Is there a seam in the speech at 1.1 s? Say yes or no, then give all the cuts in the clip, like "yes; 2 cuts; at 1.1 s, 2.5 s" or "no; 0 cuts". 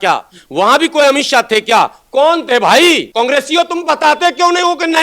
no; 1 cut; at 3.1 s